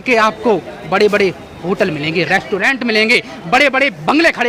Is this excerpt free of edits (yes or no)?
yes